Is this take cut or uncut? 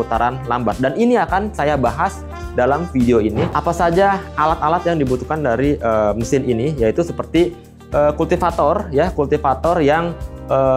cut